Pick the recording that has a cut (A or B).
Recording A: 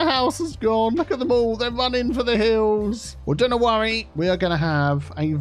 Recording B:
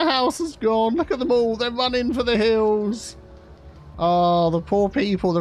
A